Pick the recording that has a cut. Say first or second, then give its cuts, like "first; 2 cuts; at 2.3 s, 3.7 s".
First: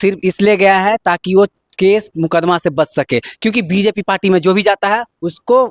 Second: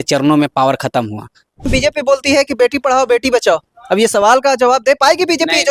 second; 1 cut; at 1.7 s